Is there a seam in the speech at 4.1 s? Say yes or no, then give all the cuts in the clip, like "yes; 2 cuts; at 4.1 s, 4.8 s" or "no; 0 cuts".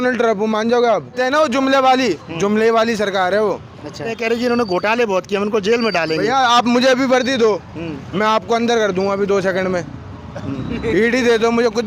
yes; 2 cuts; at 1.2 s, 4.1 s